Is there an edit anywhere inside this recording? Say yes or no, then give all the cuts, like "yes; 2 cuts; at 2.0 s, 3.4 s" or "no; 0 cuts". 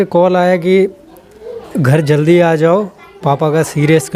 no; 0 cuts